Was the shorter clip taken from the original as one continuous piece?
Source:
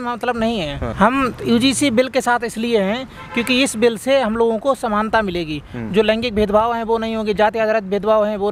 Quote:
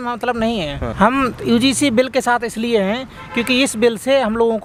yes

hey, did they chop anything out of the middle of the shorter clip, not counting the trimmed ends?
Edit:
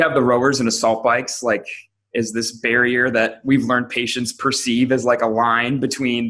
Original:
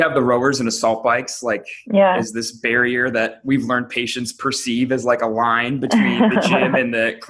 no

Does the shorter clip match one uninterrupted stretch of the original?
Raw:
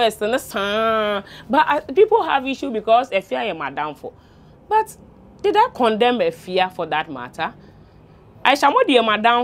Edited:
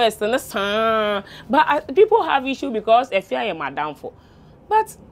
yes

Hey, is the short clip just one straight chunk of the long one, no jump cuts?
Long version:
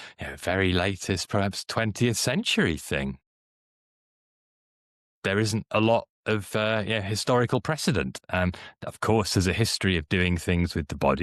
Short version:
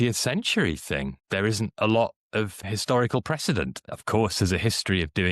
no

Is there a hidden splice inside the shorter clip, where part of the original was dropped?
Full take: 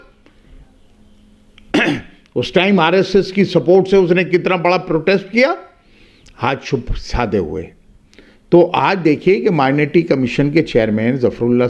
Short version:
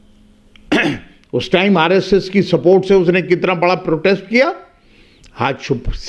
no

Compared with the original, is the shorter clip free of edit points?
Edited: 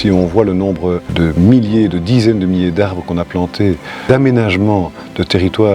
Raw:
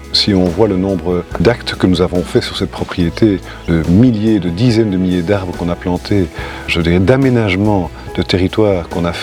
no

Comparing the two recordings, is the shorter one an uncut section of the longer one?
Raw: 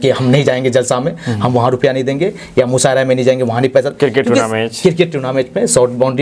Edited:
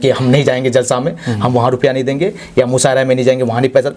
yes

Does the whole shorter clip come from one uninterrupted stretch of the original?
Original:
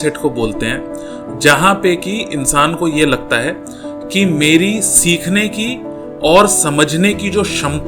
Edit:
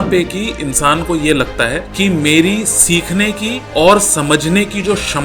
no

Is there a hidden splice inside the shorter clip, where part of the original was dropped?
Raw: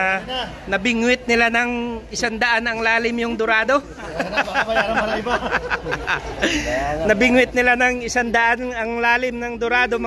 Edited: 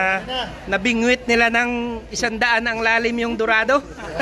no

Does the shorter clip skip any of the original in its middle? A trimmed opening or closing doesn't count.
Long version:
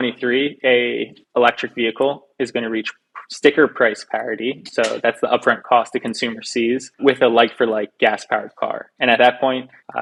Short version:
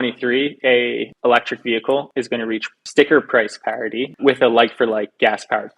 yes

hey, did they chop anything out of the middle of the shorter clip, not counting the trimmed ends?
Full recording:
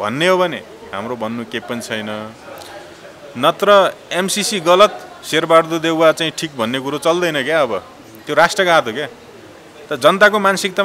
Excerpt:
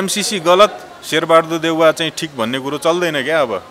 no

